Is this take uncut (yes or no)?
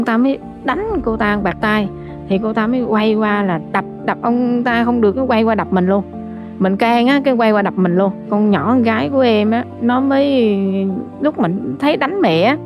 yes